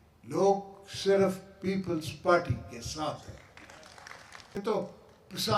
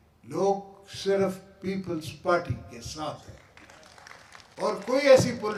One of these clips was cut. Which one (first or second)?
first